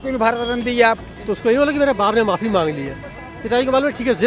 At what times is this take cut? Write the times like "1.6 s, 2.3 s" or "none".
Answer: 1.1 s

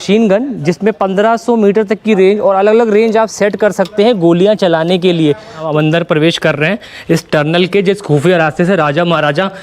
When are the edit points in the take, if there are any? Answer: 5.5 s

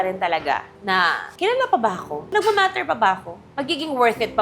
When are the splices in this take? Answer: 2.3 s

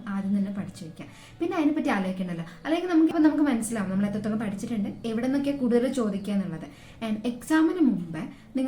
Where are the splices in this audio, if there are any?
3.1 s

